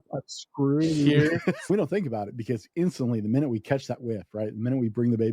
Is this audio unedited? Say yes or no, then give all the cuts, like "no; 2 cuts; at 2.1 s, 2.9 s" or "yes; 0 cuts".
no; 1 cut; at 1.7 s